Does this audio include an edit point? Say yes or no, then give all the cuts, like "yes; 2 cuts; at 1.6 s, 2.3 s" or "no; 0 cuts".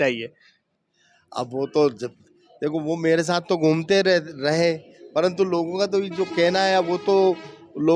no; 0 cuts